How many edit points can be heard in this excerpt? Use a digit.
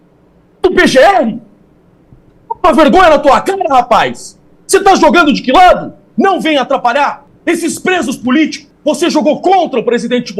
3